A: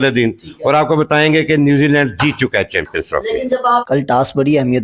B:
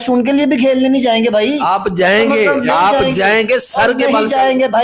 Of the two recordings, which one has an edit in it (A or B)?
A